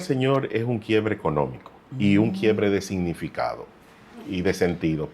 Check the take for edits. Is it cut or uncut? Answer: uncut